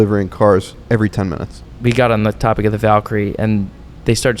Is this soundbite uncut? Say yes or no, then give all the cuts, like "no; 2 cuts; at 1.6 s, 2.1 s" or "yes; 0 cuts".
no; 1 cut; at 1.8 s